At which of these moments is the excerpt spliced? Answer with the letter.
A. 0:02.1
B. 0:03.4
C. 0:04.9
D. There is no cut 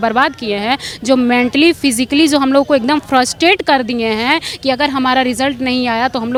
D